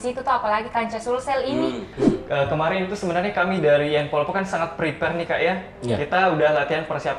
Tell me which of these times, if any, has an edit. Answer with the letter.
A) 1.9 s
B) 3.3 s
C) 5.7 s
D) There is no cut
A